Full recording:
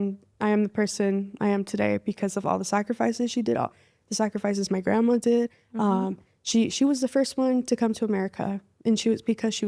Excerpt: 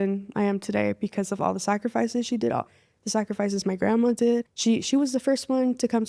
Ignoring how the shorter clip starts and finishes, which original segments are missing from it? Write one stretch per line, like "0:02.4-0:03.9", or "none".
0:05.6-0:06.4